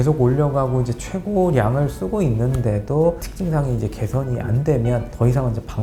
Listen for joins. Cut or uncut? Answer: uncut